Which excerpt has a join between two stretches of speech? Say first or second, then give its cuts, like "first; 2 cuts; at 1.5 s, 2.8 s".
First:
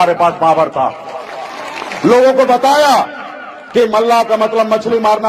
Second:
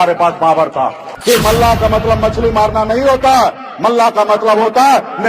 second; 1 cut; at 1.1 s